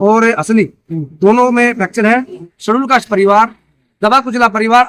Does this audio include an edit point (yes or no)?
yes